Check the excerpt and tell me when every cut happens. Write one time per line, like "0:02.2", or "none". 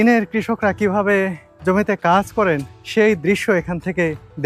0:01.5
0:02.7